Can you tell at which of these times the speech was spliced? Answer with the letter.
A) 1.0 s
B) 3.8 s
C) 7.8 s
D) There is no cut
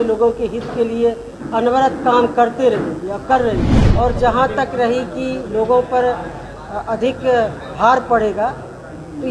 B